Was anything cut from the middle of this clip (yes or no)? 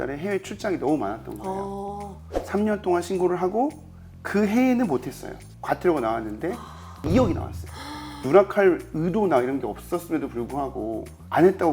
yes